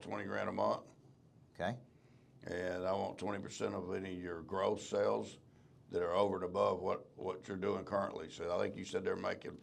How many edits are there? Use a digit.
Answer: 0